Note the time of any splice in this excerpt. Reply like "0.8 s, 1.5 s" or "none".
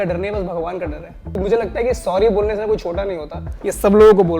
1.4 s, 3.4 s